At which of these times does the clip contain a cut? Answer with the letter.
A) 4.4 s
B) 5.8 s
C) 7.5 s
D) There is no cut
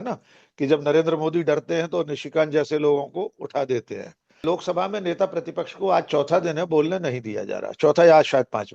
A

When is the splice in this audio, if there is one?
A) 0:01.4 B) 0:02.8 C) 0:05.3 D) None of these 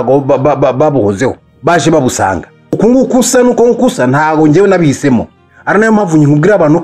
B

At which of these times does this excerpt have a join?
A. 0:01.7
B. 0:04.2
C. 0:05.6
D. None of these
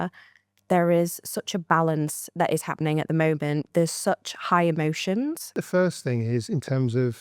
C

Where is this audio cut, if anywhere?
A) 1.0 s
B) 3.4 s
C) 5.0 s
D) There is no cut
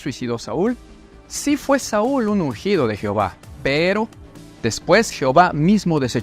A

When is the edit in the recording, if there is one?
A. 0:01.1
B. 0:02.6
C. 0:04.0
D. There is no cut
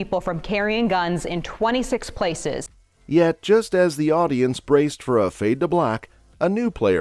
D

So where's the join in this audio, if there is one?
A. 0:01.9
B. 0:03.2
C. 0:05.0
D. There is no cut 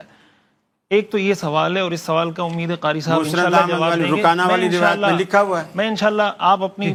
D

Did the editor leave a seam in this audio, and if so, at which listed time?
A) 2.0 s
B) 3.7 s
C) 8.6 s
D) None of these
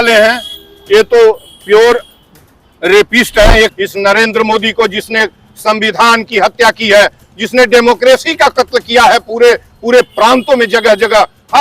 B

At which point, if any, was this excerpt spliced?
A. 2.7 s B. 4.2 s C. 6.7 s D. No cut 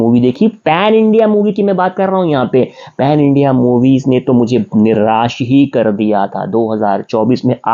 D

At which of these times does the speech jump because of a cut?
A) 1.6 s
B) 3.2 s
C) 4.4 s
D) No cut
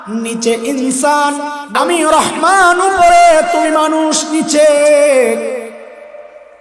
A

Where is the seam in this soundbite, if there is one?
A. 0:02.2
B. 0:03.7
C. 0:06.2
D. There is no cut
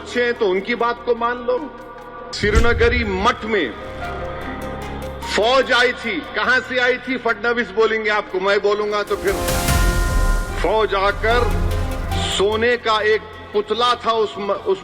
A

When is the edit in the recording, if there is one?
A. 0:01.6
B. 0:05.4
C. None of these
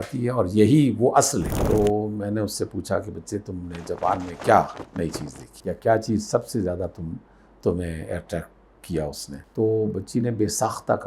A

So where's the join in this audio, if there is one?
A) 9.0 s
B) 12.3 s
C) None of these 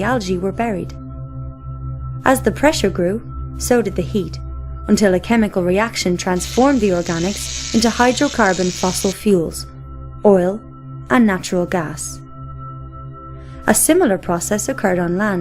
A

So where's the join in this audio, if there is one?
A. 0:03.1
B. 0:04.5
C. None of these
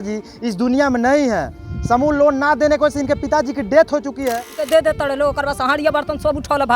B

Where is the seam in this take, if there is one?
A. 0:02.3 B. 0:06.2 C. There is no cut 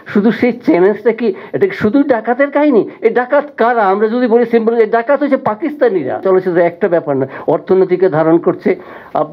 B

